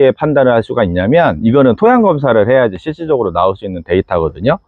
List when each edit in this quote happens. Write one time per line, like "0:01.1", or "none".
none